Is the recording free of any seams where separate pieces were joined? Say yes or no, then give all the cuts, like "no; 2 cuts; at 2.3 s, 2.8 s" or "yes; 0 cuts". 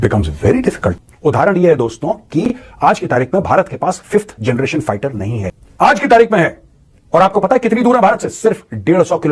no; 2 cuts; at 0.9 s, 5.5 s